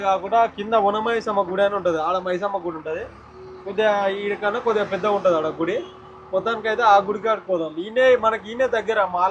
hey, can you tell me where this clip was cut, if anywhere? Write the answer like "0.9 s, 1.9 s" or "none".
none

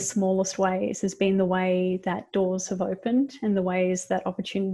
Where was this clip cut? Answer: none

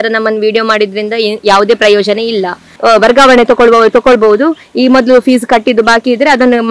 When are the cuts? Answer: 2.7 s

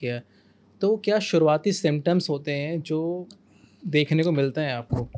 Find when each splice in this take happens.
none

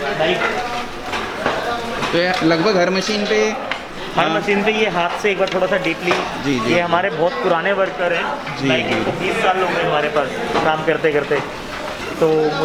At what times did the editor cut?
none

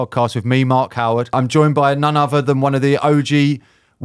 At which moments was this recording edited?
1.3 s

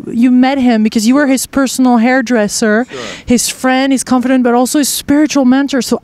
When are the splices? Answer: 3.5 s

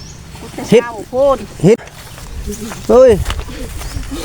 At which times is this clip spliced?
1.8 s

